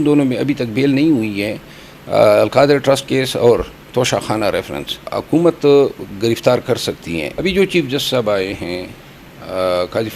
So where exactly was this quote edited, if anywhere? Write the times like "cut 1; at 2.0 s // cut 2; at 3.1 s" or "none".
cut 1; at 5.1 s // cut 2; at 7.3 s